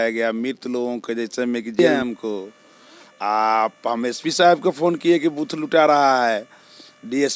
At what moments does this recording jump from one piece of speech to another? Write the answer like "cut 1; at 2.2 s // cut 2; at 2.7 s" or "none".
cut 1; at 1.8 s